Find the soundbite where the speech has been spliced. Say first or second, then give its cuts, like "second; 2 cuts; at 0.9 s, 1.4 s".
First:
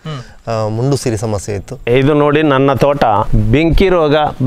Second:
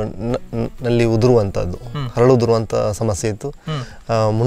first; 2 cuts; at 1.9 s, 3.3 s